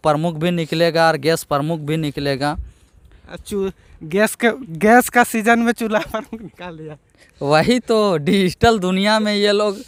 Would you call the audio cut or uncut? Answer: uncut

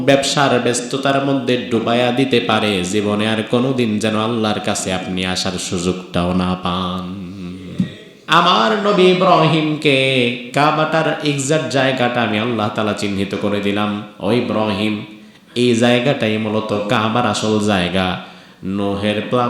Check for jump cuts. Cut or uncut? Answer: cut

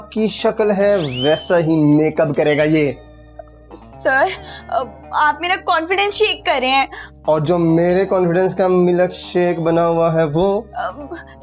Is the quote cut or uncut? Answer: uncut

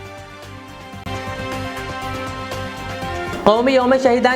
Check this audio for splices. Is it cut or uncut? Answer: cut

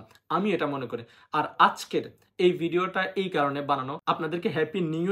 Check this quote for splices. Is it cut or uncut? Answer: uncut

